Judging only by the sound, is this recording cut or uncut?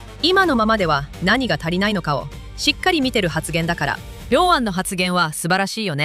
uncut